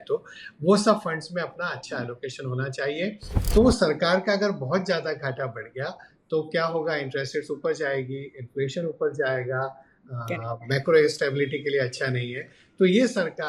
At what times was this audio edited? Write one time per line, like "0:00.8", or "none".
0:03.3